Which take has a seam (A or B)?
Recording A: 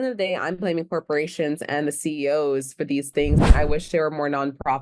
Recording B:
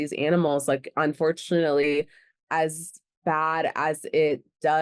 A